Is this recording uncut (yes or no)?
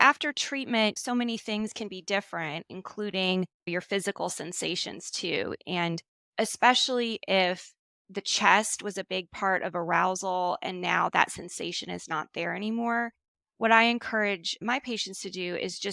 no